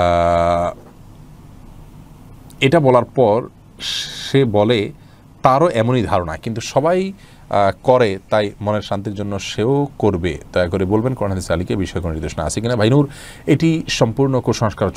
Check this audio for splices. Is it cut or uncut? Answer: uncut